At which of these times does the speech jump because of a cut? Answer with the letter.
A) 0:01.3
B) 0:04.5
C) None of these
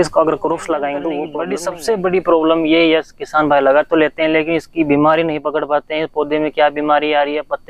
A